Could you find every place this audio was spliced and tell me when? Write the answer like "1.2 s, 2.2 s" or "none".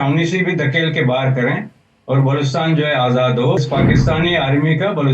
3.6 s